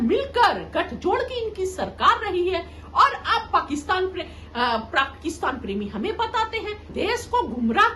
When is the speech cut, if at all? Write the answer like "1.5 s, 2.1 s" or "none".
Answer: 6.9 s